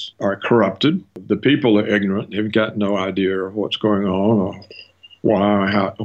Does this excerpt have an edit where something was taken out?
no; 0 cuts

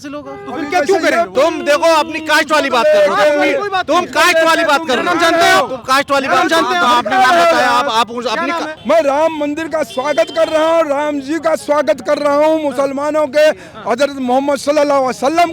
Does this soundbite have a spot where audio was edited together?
yes; 2 cuts; at 1.3 s, 8.7 s

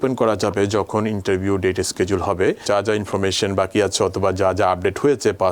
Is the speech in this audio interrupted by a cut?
yes; 1 cut; at 2.6 s

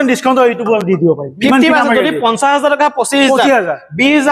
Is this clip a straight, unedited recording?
yes; 0 cuts

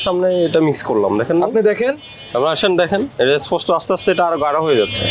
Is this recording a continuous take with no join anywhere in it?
yes; 0 cuts

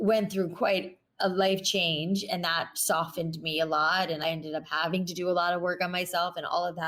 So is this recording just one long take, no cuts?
no; 1 cut; at 4.2 s

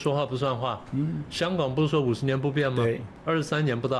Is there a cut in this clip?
yes; 1 cut; at 3.1 s

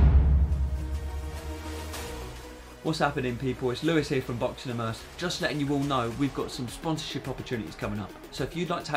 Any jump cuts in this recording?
yes; 1 cut; at 2.5 s

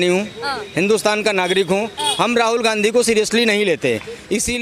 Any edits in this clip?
no; 0 cuts

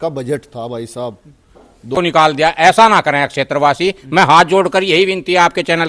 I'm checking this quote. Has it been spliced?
yes; 1 cut; at 1.8 s

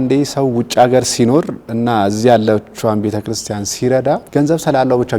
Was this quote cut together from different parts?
yes; 1 cut; at 4.2 s

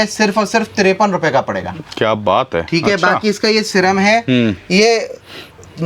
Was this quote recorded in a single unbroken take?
yes; 0 cuts

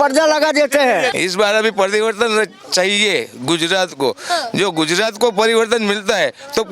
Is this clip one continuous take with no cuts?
no; 1 cut; at 1.1 s

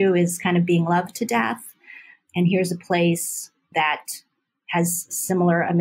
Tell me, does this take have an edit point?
yes; 2 cuts; at 2.2 s, 3.7 s

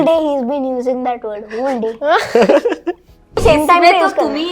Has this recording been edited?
yes; 1 cut; at 3.4 s

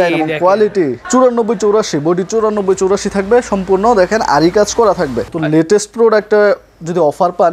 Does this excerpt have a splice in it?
yes; 2 cuts; at 1.0 s, 5.3 s

